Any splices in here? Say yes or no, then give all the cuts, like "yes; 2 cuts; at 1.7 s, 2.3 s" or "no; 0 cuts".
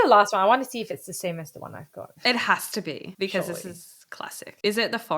no; 0 cuts